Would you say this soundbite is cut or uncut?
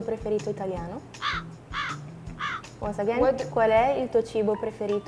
cut